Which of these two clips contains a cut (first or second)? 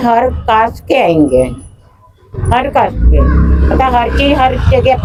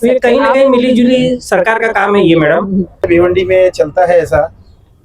second